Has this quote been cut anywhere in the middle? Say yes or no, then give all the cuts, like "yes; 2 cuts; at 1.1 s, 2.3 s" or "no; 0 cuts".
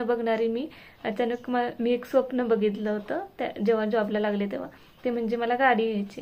no; 0 cuts